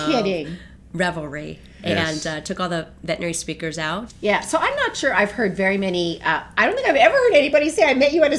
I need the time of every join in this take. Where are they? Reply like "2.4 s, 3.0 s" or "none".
4.1 s